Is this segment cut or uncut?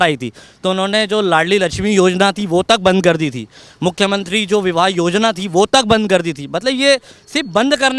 uncut